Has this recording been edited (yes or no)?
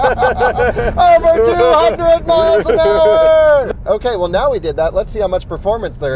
yes